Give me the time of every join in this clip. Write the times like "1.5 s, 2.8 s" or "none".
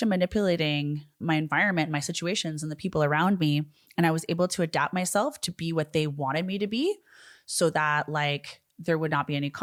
none